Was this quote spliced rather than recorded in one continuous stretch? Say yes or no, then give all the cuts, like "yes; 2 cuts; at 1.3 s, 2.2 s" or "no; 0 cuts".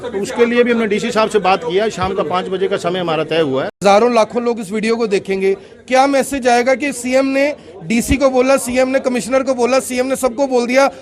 yes; 1 cut; at 3.8 s